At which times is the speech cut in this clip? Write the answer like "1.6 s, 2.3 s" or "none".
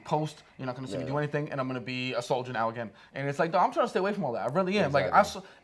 none

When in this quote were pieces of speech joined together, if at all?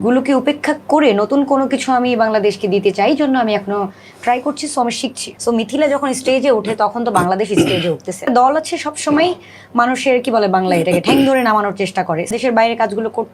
5.3 s, 8.2 s, 12.3 s

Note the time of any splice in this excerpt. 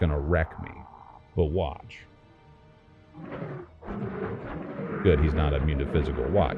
none

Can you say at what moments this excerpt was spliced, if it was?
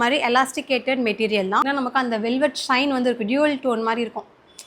1.6 s

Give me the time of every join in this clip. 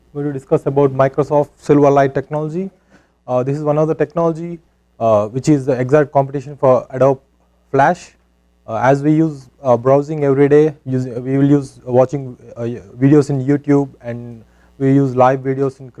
5.6 s

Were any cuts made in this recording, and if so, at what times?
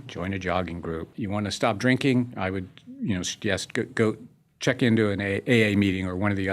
1.2 s

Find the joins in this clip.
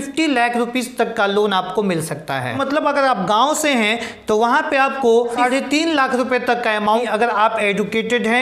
2.6 s, 5.3 s, 7.0 s

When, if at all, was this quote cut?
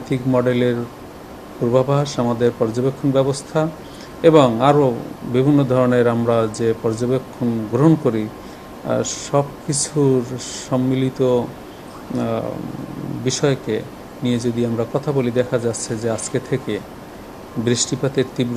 none

